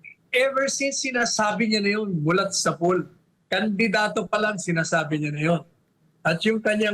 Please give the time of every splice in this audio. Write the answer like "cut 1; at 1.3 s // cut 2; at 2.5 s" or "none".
none